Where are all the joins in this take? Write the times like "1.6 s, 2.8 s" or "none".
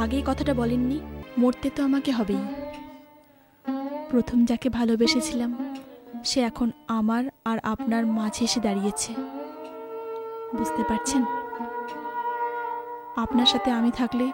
1.2 s